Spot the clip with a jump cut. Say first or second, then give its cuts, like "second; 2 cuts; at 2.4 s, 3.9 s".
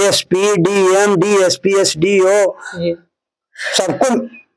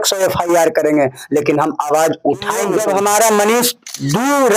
second; 1 cut; at 2.7 s